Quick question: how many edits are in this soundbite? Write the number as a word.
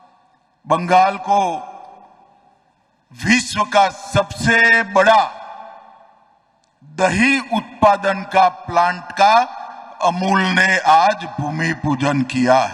zero